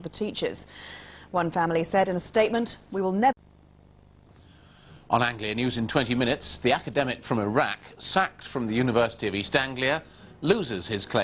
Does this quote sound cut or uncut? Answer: uncut